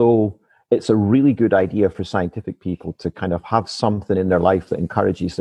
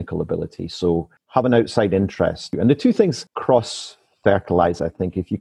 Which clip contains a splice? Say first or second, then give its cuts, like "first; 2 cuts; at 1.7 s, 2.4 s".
second; 3 cuts; at 1.2 s, 2.5 s, 3.3 s